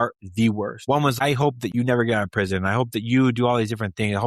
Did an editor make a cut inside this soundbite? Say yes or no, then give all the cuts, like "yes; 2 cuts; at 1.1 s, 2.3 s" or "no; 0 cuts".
yes; 1 cut; at 1.2 s